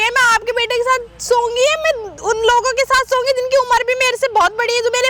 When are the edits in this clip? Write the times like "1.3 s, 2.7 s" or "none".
none